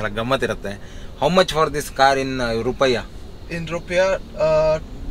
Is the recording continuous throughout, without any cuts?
yes; 0 cuts

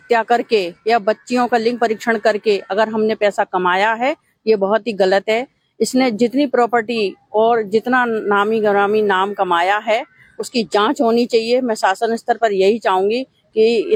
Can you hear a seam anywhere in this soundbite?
no; 0 cuts

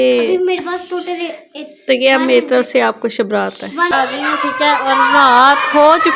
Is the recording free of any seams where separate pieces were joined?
no; 1 cut; at 3.9 s

